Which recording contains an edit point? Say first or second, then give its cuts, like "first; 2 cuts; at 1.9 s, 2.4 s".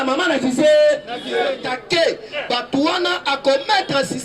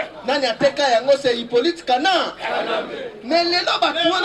first; 1 cut; at 1.7 s